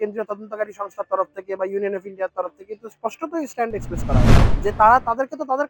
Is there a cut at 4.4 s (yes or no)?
yes